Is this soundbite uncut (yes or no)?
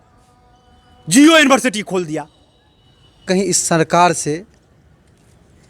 no